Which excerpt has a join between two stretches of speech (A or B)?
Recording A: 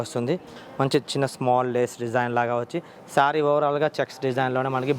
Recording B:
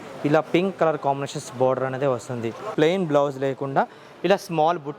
B